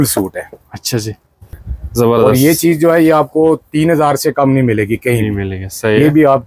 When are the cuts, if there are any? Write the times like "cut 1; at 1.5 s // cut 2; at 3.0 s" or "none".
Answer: cut 1; at 1.4 s